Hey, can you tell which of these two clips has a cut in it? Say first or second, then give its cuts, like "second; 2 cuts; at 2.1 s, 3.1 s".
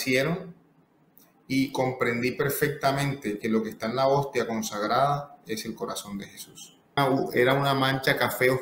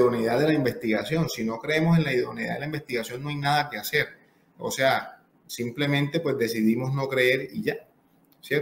first; 1 cut; at 7.0 s